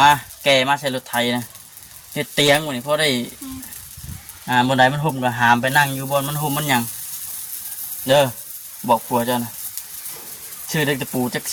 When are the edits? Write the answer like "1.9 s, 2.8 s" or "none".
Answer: none